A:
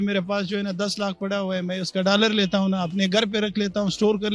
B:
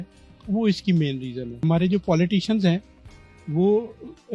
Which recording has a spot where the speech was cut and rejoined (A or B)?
B